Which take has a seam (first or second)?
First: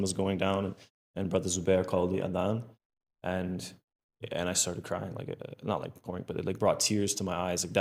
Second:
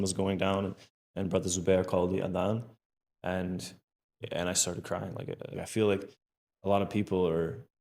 second